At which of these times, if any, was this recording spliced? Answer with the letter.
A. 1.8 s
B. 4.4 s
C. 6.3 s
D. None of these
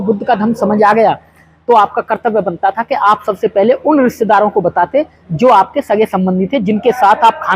D